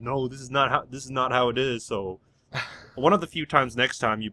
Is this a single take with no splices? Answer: yes; 0 cuts

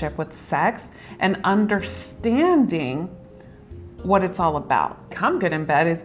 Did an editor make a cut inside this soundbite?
yes; 1 cut; at 5.0 s

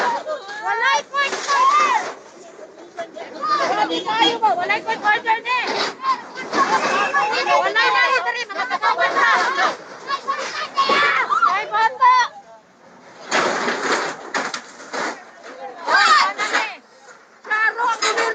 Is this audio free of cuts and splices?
yes; 0 cuts

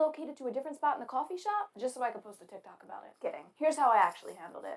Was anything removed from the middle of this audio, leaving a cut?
no; 0 cuts

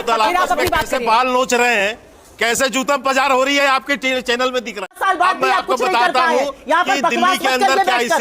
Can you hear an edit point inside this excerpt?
yes; 1 cut; at 4.9 s

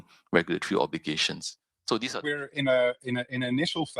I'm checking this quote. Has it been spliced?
yes; 1 cut; at 2.2 s

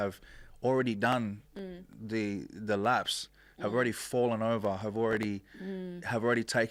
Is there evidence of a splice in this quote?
no; 0 cuts

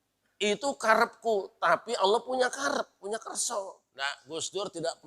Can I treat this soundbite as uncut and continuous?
no; 1 cut; at 3.8 s

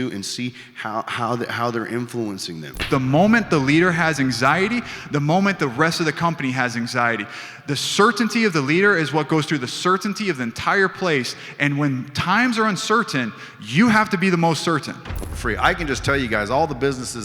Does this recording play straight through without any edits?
no; 2 cuts; at 2.9 s, 15.3 s

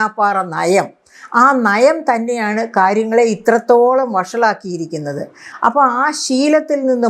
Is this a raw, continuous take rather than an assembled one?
yes; 0 cuts

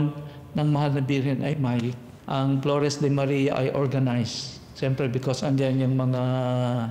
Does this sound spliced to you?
yes; 1 cut; at 2.2 s

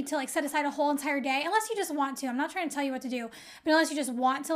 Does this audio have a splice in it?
no; 0 cuts

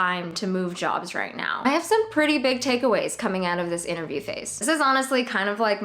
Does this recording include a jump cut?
yes; 2 cuts; at 1.5 s, 4.5 s

